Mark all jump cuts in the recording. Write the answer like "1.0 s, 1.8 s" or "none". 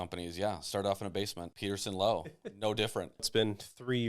1.5 s, 3.3 s